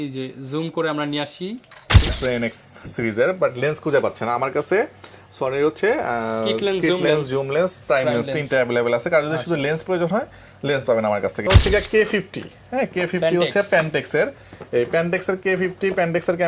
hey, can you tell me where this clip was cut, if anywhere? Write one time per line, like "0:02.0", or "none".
0:02.1
0:11.5